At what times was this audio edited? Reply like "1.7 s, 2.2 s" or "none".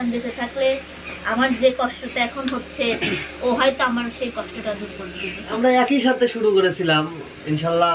5.5 s